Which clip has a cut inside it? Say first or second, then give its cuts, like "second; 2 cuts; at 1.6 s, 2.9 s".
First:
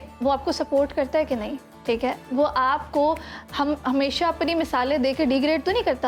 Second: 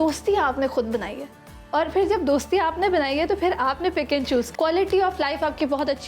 second; 1 cut; at 4.5 s